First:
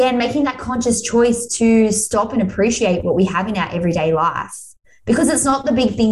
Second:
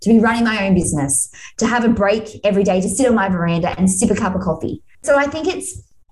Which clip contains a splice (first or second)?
second